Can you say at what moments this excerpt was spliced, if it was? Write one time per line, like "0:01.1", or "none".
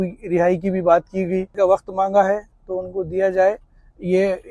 0:01.5